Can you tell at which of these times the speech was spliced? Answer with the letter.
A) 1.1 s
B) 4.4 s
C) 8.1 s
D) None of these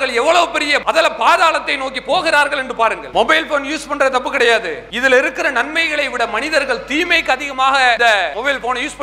C